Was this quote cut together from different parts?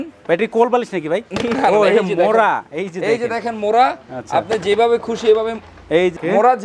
no; 0 cuts

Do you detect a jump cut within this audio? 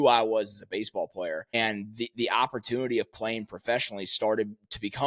yes; 1 cut; at 1.5 s

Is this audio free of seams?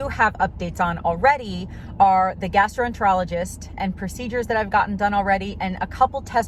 yes; 0 cuts

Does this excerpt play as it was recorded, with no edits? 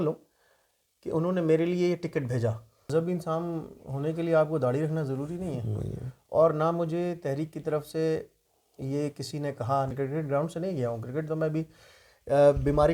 no; 2 cuts; at 2.8 s, 9.9 s

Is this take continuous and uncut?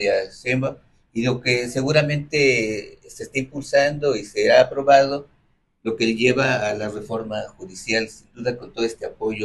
yes; 0 cuts

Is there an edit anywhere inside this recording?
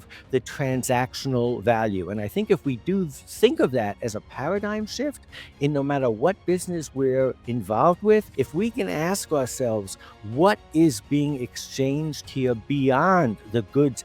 yes; 1 cut; at 8.3 s

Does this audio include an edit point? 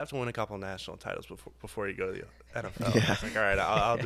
no; 0 cuts

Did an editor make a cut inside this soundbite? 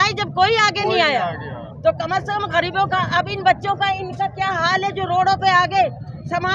no; 0 cuts

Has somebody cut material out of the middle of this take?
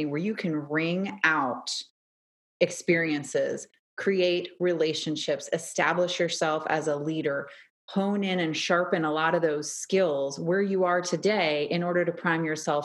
no; 0 cuts

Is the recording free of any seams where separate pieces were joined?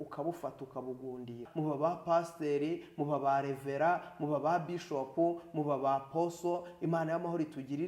no; 1 cut; at 1.5 s

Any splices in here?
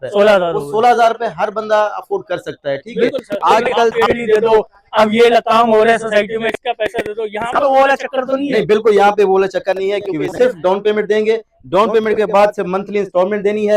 yes; 2 cuts; at 3.9 s, 10.2 s

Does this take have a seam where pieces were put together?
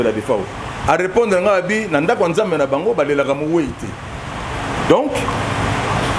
no; 0 cuts

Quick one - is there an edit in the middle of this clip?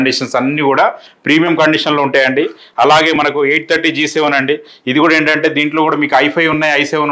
no; 0 cuts

